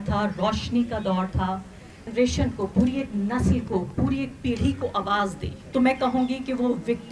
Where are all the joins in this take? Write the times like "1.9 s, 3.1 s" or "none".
2.1 s, 5.5 s